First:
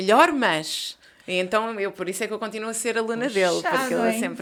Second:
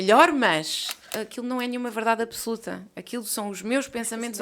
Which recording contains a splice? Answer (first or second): second